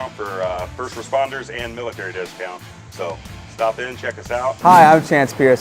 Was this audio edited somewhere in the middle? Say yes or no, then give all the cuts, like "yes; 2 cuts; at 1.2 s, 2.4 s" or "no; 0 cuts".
yes; 1 cut; at 4.6 s